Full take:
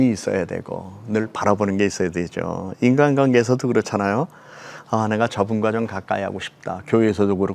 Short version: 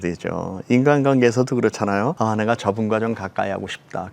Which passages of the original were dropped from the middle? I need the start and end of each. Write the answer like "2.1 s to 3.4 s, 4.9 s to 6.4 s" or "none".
4.3 s to 4.9 s